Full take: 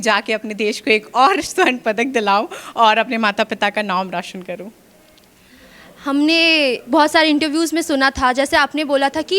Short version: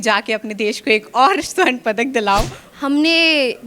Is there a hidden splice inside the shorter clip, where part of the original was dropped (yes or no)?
yes